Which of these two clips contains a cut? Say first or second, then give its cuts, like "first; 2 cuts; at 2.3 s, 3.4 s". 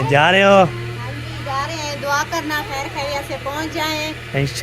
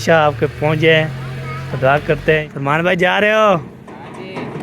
second; 1 cut; at 2.5 s